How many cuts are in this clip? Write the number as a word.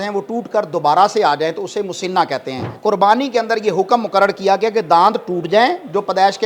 one